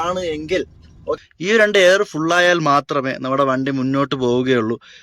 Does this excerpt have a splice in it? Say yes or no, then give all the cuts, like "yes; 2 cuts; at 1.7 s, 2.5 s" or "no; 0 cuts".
yes; 1 cut; at 1.2 s